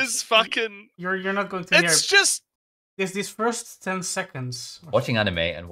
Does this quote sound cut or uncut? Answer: uncut